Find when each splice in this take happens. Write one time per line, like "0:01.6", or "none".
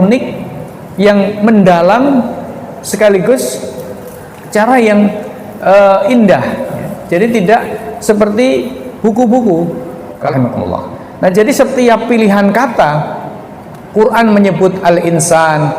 0:10.3